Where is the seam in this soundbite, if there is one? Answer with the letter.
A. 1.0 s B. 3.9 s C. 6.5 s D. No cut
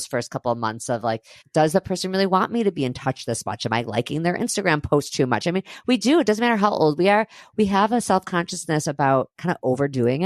D